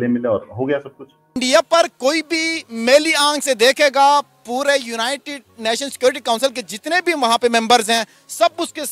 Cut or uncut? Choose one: cut